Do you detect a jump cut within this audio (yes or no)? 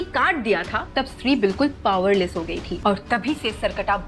yes